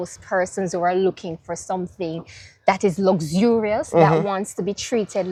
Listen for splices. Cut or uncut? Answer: uncut